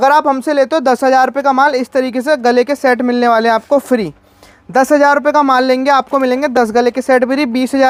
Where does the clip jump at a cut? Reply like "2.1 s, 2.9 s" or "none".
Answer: none